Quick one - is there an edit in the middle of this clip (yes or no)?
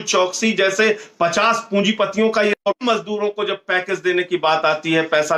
no